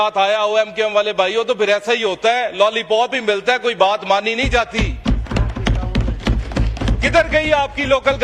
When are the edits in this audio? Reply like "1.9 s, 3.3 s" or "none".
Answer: none

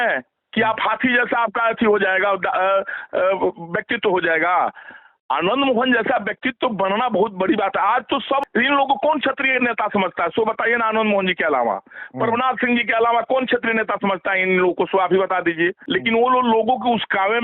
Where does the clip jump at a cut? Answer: 8.4 s, 15.8 s

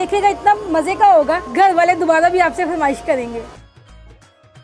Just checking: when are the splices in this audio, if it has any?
3.5 s

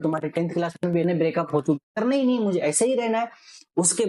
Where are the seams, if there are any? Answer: 1.8 s

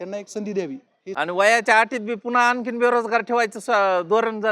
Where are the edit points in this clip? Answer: 1.0 s

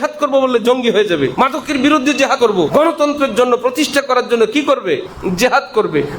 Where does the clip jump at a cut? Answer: 1.3 s, 2.5 s, 5.1 s

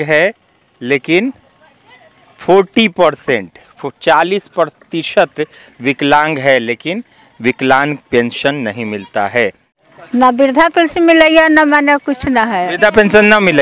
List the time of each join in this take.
9.7 s

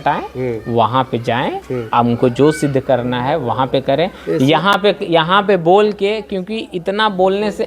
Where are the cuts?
none

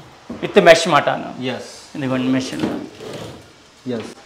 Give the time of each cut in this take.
none

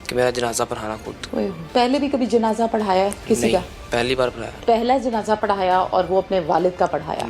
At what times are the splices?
1.6 s, 4.5 s

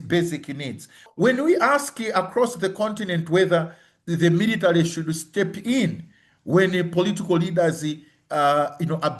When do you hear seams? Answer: 1.1 s

